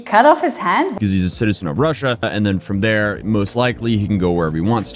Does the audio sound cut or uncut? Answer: cut